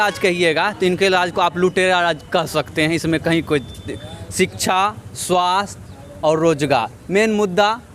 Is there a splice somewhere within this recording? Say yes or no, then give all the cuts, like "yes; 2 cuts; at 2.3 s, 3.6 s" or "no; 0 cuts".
no; 0 cuts